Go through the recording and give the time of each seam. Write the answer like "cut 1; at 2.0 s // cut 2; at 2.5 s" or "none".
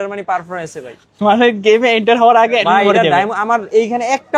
none